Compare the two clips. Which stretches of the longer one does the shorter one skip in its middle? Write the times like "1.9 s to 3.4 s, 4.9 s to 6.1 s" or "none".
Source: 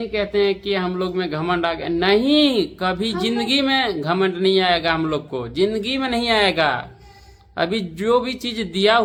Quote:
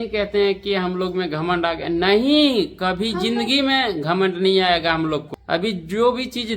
5.3 s to 7.4 s